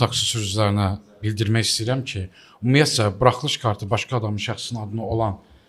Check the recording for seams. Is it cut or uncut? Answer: uncut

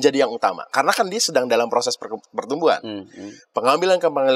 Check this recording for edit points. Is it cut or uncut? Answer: uncut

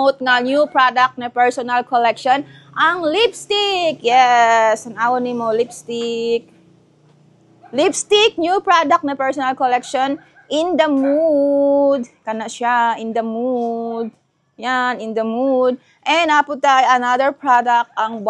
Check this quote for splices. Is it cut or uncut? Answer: uncut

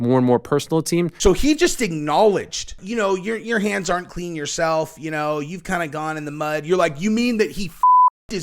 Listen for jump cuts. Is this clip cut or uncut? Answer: cut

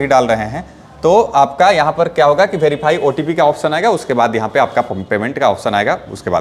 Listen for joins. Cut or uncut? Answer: uncut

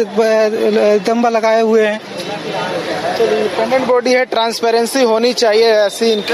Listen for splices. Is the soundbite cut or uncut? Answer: uncut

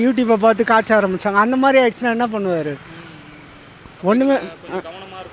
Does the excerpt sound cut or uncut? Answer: uncut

